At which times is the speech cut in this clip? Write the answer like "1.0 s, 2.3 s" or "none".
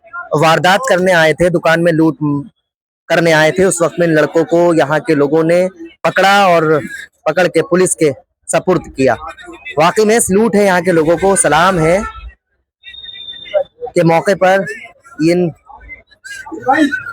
5.9 s

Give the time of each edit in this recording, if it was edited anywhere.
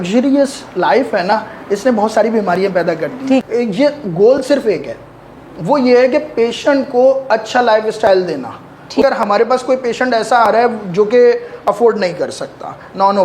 3.4 s, 9.0 s

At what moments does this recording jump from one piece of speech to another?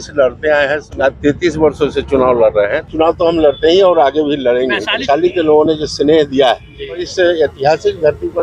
0.9 s, 2.8 s, 5.0 s, 7.0 s

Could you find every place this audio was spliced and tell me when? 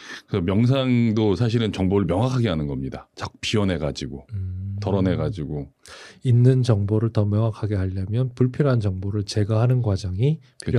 none

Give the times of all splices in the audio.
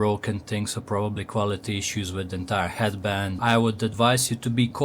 3.3 s

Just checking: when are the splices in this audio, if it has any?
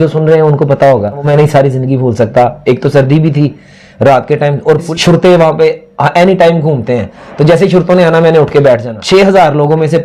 1.2 s, 4.9 s, 8.9 s

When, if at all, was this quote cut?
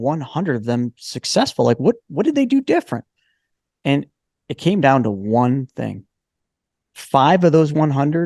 none

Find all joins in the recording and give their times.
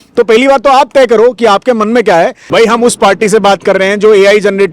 2.4 s

